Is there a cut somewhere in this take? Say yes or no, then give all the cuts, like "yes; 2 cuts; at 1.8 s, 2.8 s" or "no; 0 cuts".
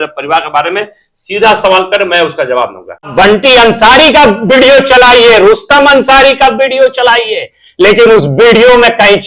yes; 1 cut; at 3.1 s